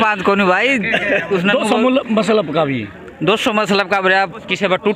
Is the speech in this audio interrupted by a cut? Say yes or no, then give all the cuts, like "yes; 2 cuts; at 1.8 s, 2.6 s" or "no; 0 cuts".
no; 0 cuts